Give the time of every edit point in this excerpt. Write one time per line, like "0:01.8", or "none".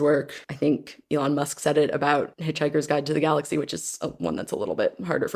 0:00.8
0:02.4